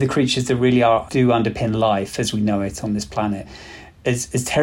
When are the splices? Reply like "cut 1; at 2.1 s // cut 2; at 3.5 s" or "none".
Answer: cut 1; at 1.1 s // cut 2; at 3.5 s